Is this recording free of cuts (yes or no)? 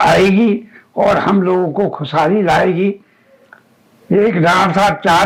yes